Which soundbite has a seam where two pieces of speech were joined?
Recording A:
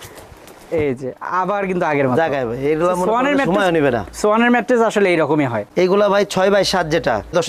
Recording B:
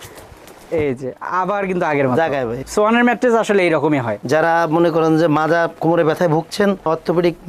B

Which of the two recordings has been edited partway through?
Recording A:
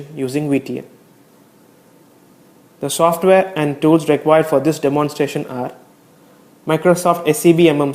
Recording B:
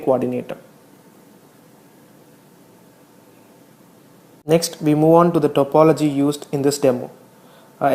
A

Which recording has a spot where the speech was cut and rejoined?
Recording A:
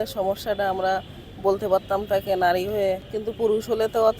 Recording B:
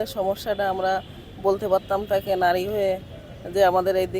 A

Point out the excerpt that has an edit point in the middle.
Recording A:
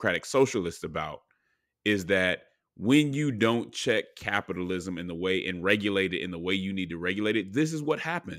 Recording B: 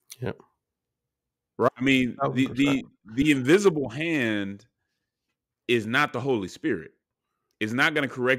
B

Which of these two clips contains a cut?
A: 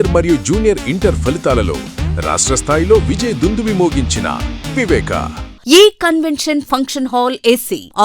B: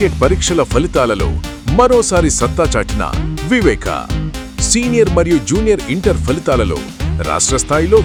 A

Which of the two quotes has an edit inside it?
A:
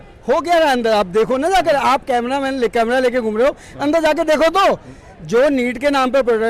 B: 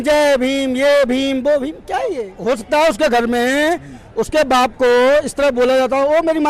B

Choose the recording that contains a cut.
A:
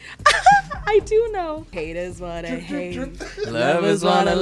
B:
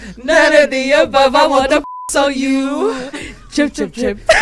A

